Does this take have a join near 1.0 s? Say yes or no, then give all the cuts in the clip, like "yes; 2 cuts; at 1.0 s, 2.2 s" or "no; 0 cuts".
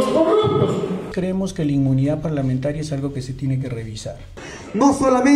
yes; 2 cuts; at 1.0 s, 4.5 s